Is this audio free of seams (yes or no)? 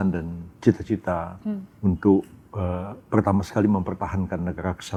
yes